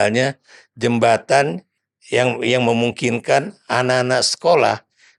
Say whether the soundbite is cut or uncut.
cut